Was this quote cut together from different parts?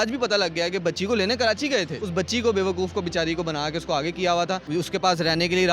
yes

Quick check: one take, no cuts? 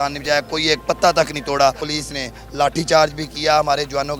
no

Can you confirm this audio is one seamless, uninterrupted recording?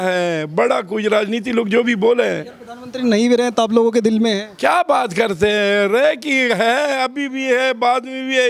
yes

